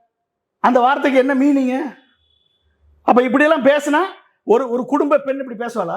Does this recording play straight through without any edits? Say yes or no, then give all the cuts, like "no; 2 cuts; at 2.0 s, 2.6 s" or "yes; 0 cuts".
yes; 0 cuts